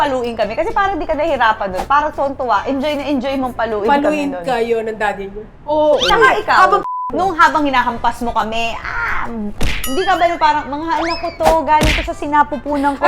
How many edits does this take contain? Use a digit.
1